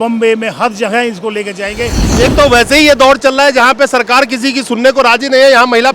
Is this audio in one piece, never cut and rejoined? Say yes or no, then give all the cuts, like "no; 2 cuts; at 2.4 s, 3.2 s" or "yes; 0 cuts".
no; 1 cut; at 2.0 s